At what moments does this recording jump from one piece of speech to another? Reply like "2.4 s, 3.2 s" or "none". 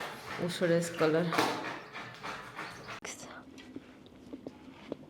3.0 s